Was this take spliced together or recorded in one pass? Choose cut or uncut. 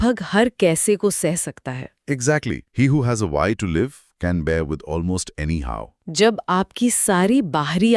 uncut